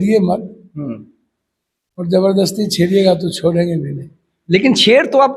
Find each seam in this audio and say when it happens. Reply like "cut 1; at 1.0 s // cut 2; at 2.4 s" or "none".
none